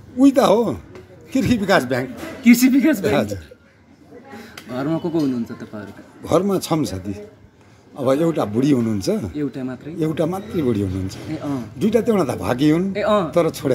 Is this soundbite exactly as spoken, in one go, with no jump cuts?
yes; 0 cuts

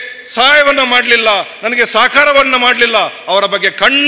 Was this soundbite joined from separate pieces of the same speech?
no; 0 cuts

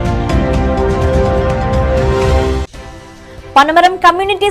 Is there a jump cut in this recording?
no; 0 cuts

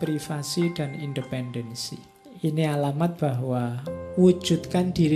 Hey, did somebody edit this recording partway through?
yes; 1 cut; at 1.7 s

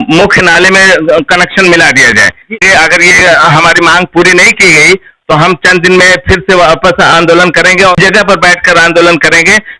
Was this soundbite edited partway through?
yes; 2 cuts; at 2.6 s, 7.9 s

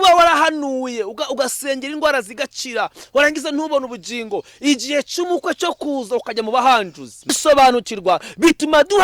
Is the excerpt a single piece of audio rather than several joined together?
no; 1 cut; at 7.3 s

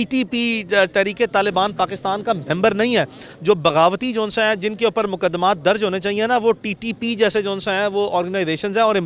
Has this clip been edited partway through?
no; 0 cuts

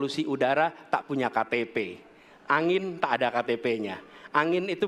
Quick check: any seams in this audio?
no; 0 cuts

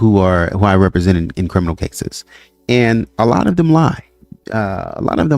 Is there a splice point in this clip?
no; 0 cuts

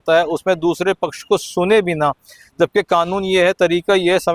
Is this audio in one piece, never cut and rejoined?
yes; 0 cuts

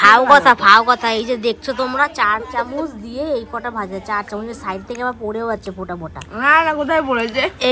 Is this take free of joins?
yes; 0 cuts

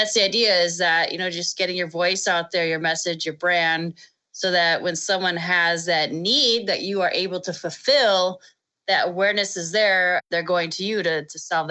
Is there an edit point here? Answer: yes; 1 cut; at 10.2 s

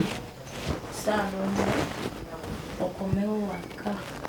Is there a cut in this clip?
no; 0 cuts

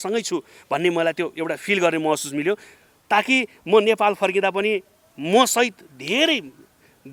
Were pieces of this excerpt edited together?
no; 0 cuts

